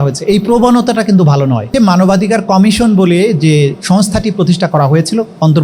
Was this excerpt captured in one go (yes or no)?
no